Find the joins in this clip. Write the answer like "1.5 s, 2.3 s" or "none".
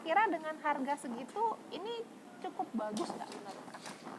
none